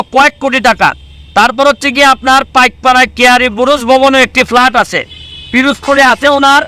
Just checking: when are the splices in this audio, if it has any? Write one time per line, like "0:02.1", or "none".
none